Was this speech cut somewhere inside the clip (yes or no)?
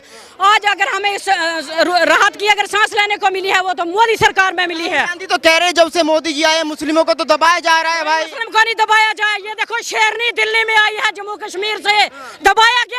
no